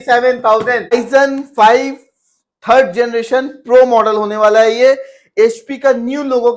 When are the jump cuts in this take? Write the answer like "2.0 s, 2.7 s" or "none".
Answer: 0.9 s

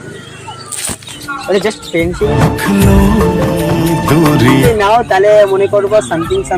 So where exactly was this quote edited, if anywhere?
1.2 s, 2.4 s, 3.6 s, 4.7 s

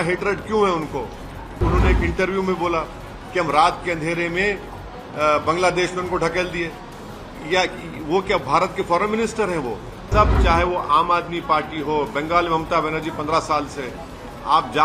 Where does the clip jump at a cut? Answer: 1.6 s, 10.0 s

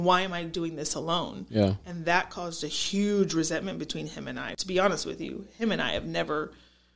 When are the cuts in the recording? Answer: 4.5 s

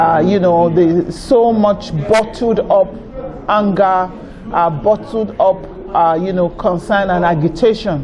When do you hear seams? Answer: none

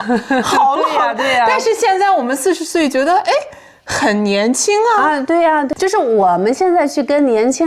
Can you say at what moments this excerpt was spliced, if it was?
5.7 s

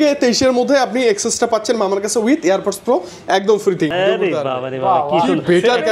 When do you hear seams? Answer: 3.9 s

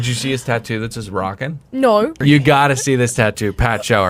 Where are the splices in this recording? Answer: 2.2 s

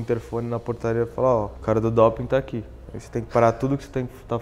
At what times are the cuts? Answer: 1.5 s

